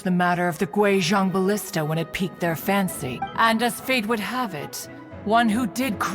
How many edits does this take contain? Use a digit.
1